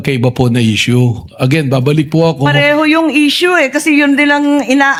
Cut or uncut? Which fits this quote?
uncut